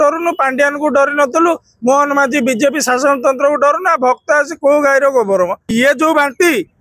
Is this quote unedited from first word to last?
no; 1 cut; at 5.7 s

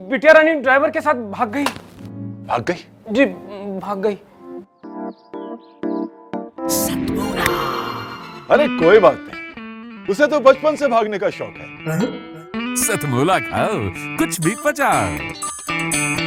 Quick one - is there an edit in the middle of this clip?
no; 0 cuts

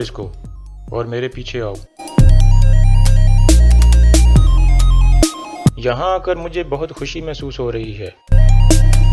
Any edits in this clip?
yes; 1 cut; at 5.4 s

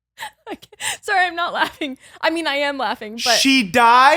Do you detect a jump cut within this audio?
no; 0 cuts

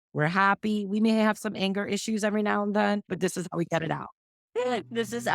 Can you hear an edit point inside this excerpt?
yes; 1 cut; at 4.2 s

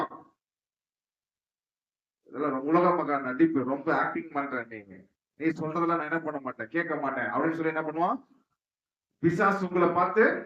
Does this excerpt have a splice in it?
no; 0 cuts

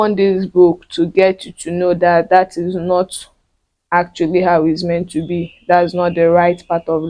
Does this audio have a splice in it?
no; 0 cuts

